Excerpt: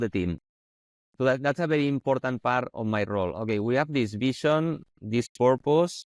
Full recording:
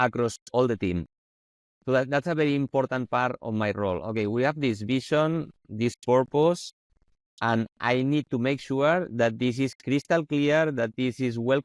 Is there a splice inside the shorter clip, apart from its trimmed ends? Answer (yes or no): no